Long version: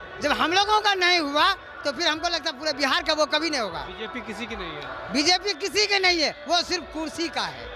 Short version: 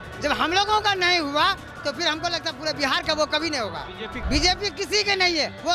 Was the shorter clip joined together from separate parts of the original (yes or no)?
yes